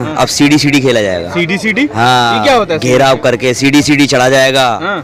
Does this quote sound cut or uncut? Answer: uncut